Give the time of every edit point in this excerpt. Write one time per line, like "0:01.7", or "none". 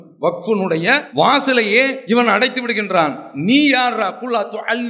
0:01.1
0:02.0